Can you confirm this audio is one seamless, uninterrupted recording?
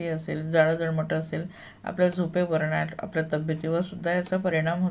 yes; 0 cuts

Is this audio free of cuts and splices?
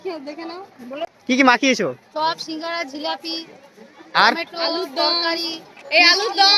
no; 1 cut; at 1.1 s

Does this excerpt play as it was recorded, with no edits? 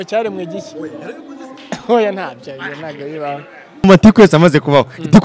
no; 1 cut; at 3.8 s

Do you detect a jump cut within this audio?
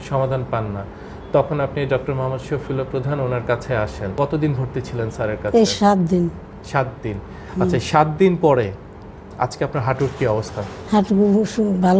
yes; 1 cut; at 4.1 s

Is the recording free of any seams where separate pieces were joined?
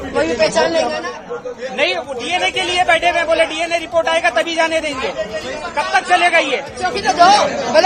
no; 2 cuts; at 1.0 s, 6.9 s

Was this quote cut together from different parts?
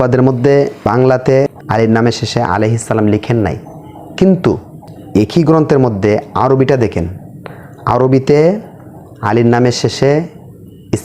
yes; 2 cuts; at 0.9 s, 1.6 s

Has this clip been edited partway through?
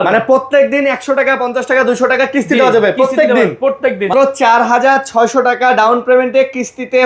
yes; 1 cut; at 4.1 s

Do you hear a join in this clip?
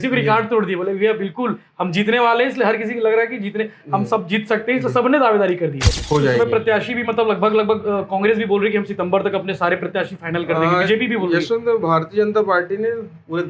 yes; 1 cut; at 5.9 s

